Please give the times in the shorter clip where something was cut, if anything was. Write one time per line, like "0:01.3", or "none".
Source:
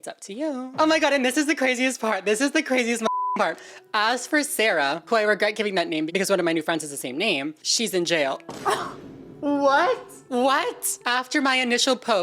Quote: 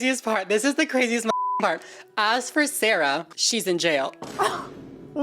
0:03.3